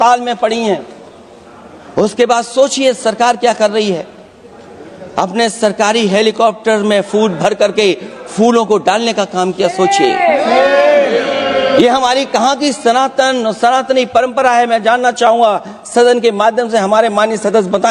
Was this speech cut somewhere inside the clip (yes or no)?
no